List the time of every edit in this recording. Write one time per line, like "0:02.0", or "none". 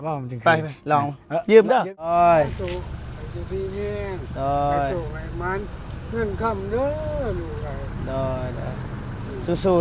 0:01.9